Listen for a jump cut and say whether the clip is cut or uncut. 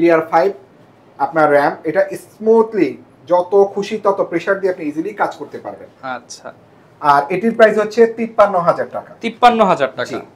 uncut